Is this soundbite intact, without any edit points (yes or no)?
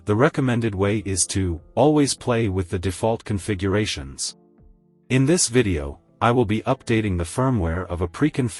yes